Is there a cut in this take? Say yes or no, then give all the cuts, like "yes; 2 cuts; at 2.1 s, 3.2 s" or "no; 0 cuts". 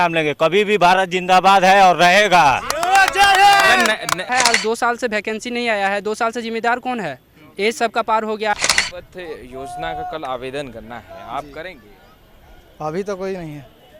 yes; 2 cuts; at 4.3 s, 8.5 s